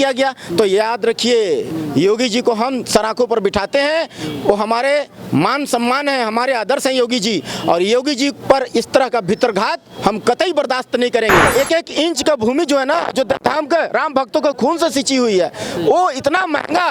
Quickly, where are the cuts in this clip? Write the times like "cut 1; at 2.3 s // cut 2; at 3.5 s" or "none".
cut 1; at 11.5 s